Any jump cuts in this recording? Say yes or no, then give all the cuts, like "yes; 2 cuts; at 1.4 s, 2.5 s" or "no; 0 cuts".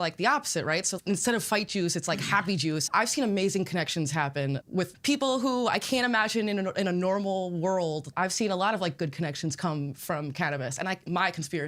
yes; 4 cuts; at 0.9 s, 2.8 s, 4.6 s, 8.1 s